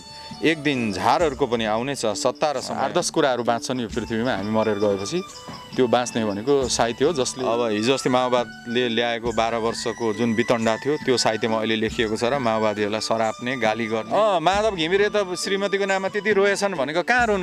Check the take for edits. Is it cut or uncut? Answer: cut